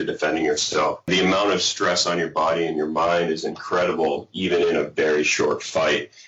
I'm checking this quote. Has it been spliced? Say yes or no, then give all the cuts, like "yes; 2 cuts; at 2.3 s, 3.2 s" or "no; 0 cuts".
yes; 1 cut; at 1.1 s